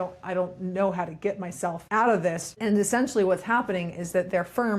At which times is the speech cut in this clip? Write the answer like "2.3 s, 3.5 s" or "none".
1.8 s, 2.6 s